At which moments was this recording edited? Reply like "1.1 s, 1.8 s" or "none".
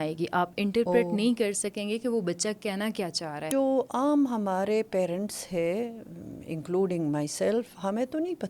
3.5 s